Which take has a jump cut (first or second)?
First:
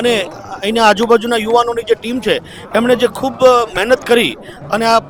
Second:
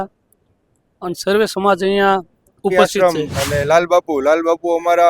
second